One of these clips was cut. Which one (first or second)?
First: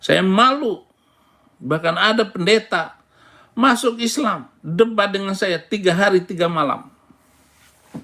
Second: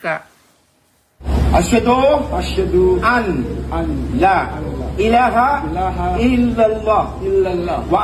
second